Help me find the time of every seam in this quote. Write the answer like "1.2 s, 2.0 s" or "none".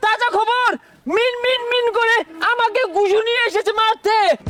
none